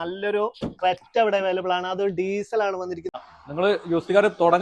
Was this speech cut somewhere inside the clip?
yes; 1 cut; at 3.1 s

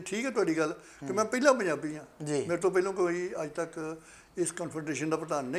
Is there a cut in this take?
no; 0 cuts

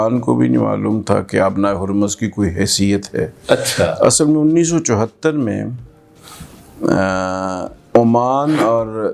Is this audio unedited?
yes; 0 cuts

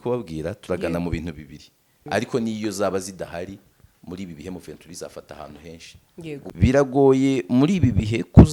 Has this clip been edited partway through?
yes; 2 cuts; at 2.0 s, 6.5 s

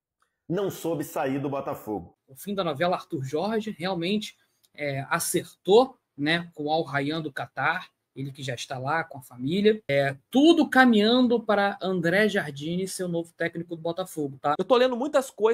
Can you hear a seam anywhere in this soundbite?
yes; 2 cuts; at 9.8 s, 14.6 s

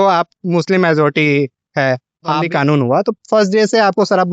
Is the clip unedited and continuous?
no; 1 cut; at 2.4 s

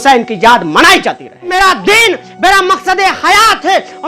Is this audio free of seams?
no; 1 cut; at 1.5 s

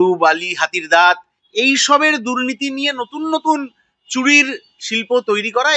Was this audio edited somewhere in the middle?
no; 0 cuts

